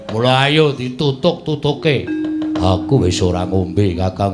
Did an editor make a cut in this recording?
no; 0 cuts

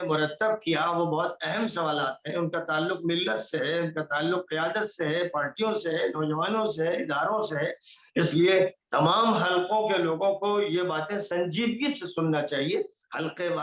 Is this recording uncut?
yes; 0 cuts

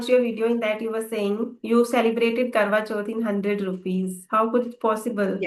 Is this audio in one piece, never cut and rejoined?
yes; 0 cuts

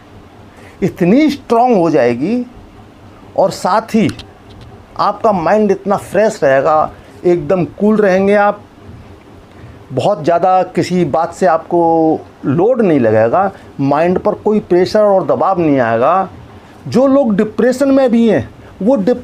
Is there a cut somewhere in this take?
no; 0 cuts

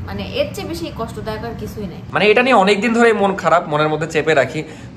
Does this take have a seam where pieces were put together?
yes; 1 cut; at 2.0 s

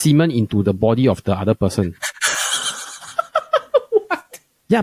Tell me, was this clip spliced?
no; 0 cuts

